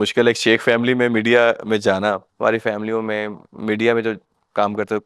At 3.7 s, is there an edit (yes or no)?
no